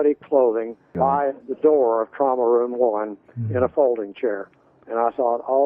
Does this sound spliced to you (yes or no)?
no